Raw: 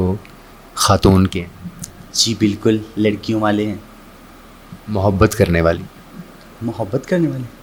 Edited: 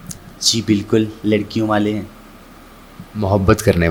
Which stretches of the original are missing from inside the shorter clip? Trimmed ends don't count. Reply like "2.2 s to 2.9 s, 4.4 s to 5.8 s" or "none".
none